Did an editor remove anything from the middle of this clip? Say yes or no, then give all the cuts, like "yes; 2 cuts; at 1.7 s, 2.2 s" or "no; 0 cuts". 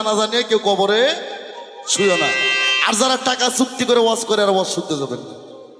no; 0 cuts